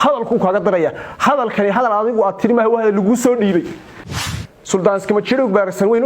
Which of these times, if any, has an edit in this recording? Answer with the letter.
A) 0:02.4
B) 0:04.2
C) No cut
B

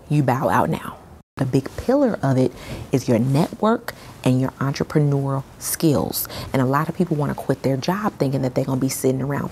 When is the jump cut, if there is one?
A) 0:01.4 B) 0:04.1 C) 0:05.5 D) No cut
A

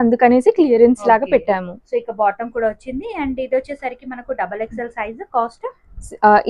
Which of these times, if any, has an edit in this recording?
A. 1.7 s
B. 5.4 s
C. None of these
C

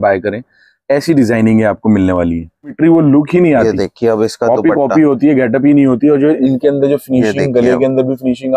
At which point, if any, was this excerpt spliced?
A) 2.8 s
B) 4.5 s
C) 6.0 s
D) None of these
A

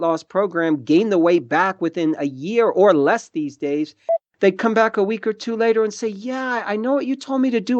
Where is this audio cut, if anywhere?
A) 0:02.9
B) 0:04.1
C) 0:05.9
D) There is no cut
B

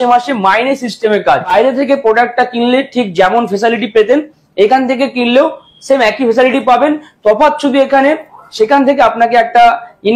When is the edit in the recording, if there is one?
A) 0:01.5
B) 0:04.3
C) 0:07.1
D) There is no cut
A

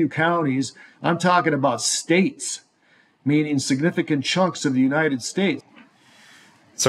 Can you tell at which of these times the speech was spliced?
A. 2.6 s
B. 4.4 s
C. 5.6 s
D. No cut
C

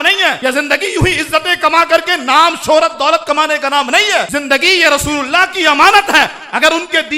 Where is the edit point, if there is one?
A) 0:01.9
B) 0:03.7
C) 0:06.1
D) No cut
D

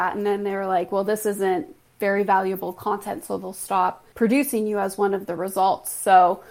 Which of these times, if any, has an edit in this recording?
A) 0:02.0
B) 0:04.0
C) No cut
B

